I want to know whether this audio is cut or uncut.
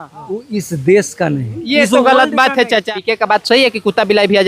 cut